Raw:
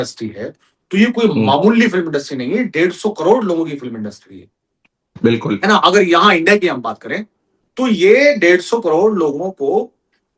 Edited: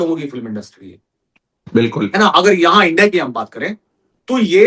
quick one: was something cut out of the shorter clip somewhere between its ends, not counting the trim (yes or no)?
no